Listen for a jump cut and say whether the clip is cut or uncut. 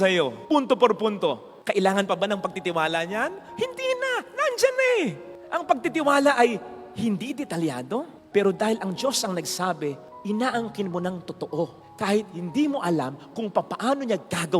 uncut